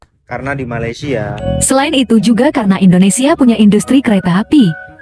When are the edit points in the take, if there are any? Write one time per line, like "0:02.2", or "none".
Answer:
0:01.5